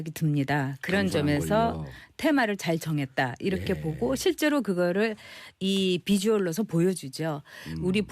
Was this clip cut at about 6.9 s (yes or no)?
yes